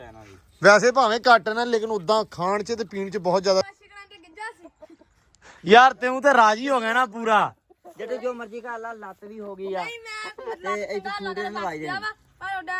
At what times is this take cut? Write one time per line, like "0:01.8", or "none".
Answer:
0:03.7